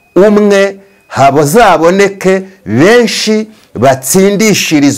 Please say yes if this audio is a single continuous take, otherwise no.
yes